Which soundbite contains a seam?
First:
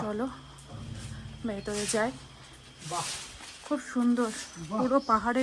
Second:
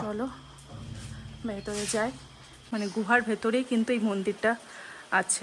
second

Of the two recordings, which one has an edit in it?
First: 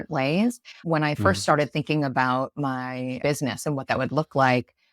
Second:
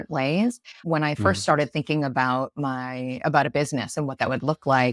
first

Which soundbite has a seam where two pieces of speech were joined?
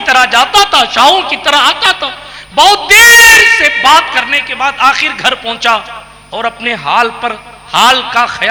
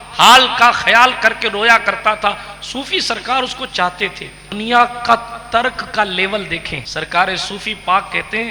second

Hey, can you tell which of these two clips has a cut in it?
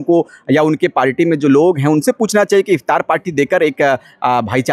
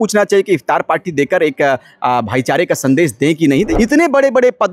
second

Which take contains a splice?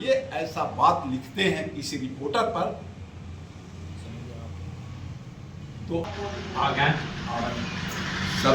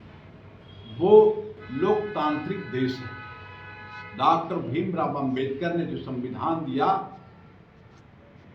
first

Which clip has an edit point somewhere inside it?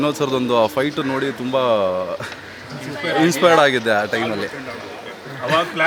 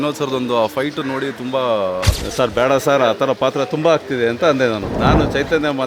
second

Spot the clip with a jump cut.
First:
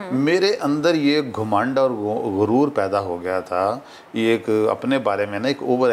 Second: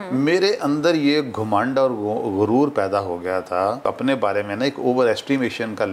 second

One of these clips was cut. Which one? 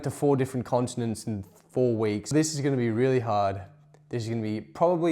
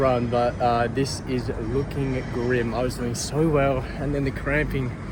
first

